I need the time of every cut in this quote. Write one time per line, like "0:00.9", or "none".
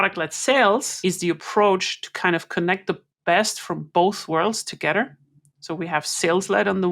0:00.9